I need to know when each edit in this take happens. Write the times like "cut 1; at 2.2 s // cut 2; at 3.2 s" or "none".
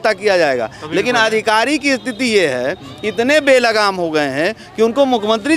none